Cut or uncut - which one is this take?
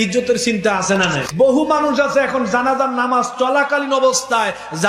cut